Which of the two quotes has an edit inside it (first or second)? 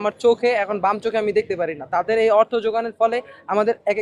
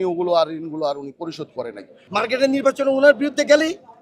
second